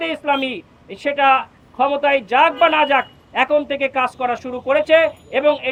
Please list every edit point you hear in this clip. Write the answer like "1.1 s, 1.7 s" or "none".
none